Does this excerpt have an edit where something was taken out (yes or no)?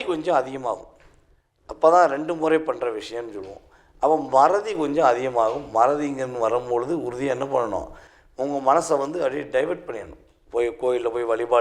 no